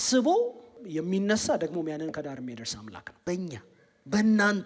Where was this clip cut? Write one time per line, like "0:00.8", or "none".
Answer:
0:00.8
0:03.1